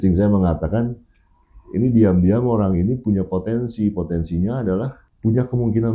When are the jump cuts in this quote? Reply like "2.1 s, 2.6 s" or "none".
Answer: none